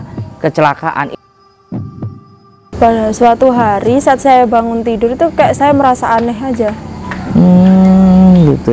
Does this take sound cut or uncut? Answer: cut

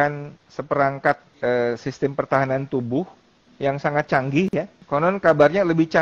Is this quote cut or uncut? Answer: cut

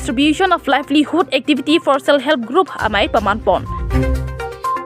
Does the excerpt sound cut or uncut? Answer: cut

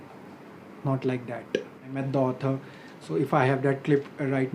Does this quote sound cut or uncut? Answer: cut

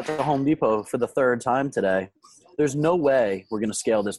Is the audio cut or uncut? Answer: uncut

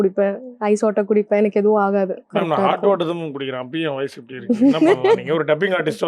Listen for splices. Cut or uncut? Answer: cut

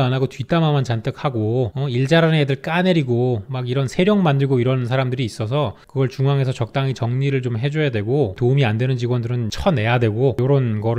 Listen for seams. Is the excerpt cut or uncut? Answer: uncut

